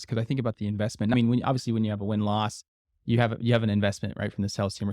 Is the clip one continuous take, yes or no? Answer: no